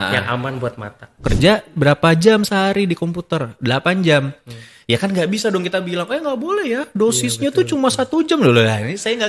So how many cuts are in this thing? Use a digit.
1